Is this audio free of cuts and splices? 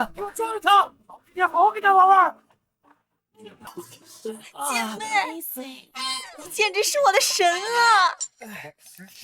no; 1 cut; at 3.7 s

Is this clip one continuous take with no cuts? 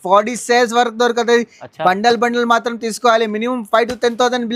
yes; 0 cuts

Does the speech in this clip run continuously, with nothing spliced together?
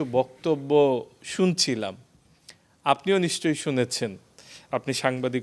yes; 0 cuts

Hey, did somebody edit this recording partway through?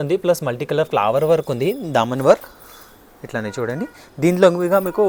no; 0 cuts

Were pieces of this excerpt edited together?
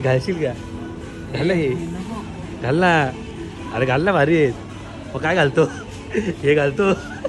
no; 0 cuts

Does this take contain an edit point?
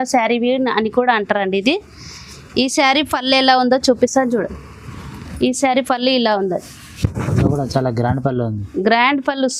no; 0 cuts

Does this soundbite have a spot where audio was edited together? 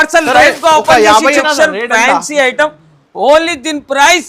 yes; 1 cut; at 1.4 s

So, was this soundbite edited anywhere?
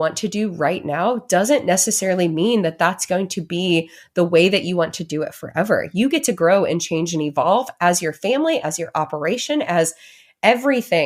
no; 0 cuts

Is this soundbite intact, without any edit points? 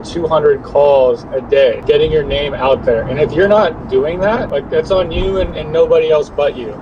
yes; 0 cuts

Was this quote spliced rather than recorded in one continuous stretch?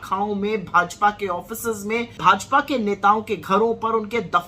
yes; 1 cut; at 2.1 s

